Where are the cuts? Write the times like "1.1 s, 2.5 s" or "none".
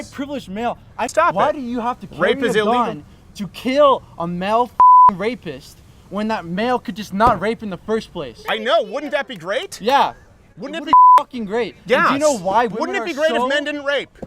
1.0 s